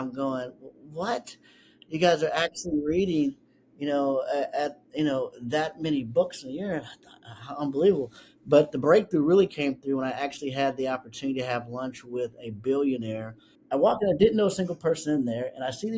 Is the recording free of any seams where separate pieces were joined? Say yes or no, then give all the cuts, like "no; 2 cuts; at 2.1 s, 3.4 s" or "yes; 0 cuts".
no; 1 cut; at 13.5 s